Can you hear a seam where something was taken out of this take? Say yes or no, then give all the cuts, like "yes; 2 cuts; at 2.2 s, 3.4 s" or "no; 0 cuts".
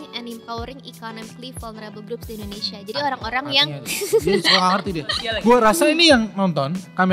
yes; 1 cut; at 5.1 s